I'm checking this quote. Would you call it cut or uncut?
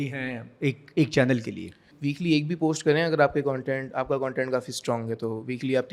cut